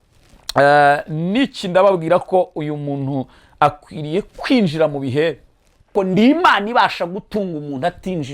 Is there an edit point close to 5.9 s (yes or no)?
yes